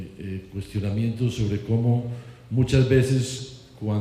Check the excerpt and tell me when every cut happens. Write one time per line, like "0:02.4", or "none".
0:02.4